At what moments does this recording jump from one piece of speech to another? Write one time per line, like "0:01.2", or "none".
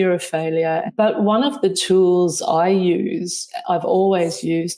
0:00.9
0:01.8

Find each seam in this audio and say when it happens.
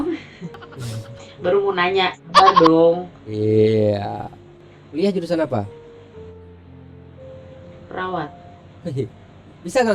0:04.8

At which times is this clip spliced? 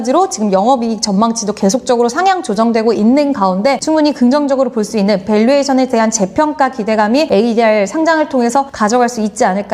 0:03.8
0:07.3
0:08.7

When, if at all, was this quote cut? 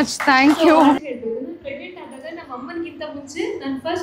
0:01.0

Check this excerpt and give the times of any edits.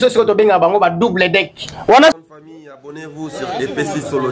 0:02.2

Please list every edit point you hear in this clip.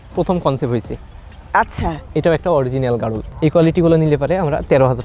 0:03.2

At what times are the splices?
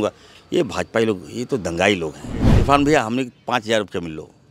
0:02.5

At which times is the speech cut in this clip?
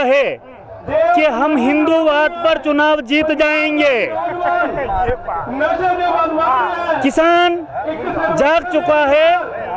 none

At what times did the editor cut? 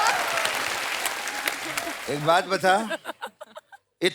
0:01.9

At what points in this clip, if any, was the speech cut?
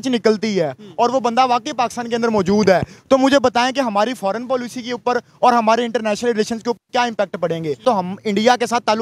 0:07.8

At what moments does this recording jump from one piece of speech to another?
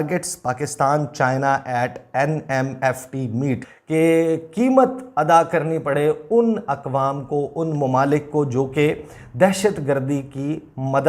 0:03.6

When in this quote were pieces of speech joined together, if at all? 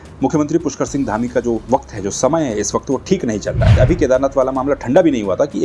0:03.7

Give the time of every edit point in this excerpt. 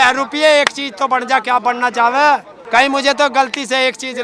0:02.5

